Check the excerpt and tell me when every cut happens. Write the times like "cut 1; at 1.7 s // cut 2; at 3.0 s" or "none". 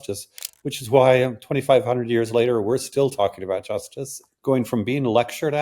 cut 1; at 4.2 s